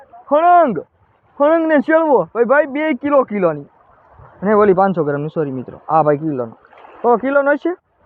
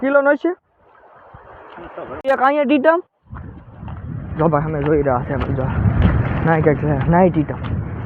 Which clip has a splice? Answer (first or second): second